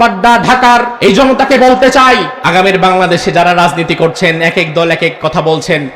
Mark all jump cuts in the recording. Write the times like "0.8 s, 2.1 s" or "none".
0.9 s, 2.4 s